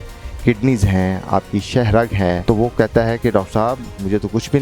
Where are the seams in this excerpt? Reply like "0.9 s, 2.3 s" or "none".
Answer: 2.4 s